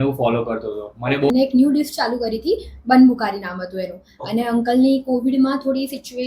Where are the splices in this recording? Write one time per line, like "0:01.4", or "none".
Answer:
0:01.3

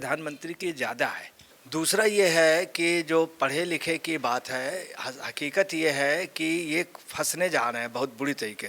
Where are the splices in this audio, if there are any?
0:01.6

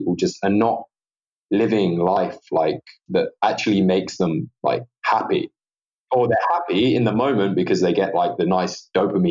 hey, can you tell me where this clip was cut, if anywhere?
0:02.9
0:06.0

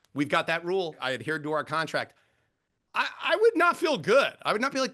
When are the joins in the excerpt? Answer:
0:01.0

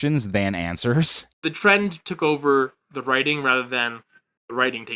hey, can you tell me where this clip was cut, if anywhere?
0:01.2

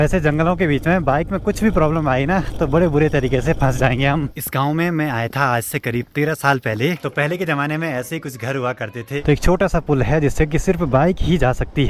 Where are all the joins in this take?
0:04.3
0:07.0
0:09.2

